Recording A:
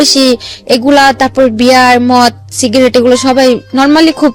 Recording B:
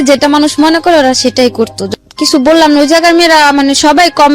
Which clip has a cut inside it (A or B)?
B